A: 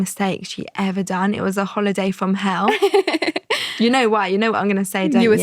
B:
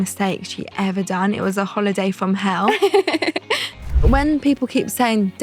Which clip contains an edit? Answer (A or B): B